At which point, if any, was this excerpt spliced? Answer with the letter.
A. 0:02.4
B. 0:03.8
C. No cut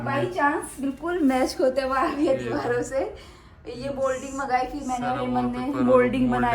C